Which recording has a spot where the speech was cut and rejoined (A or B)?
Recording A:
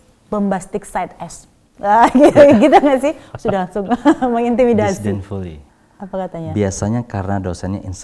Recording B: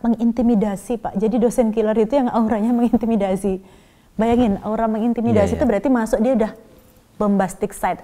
A